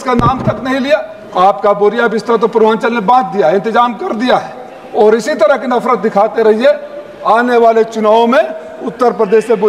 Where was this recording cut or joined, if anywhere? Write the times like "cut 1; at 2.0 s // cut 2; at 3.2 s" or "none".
cut 1; at 1.2 s